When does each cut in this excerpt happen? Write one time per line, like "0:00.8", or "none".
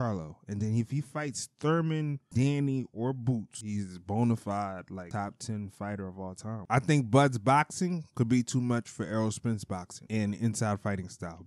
0:03.6
0:06.5